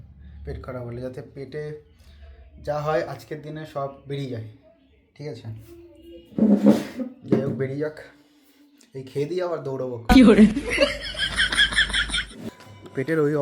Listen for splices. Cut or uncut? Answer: cut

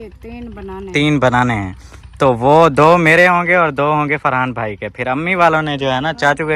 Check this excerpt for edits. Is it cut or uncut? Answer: uncut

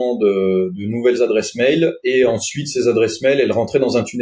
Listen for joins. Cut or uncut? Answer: uncut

